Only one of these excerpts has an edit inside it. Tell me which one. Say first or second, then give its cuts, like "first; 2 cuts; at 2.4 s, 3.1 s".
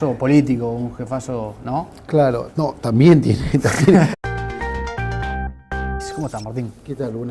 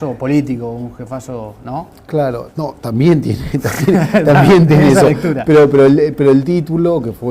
second; 1 cut; at 4.1 s